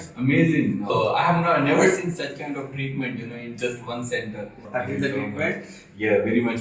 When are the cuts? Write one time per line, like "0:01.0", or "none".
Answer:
0:00.9
0:04.6